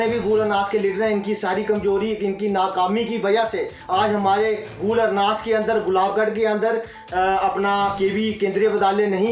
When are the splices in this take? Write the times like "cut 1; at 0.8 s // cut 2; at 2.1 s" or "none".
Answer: none